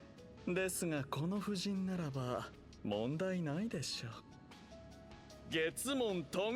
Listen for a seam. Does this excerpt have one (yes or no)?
no